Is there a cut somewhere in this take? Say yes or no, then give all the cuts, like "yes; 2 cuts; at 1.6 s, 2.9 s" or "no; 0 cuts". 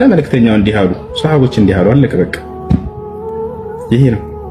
no; 0 cuts